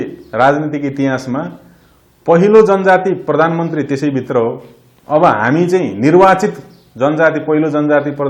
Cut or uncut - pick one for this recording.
uncut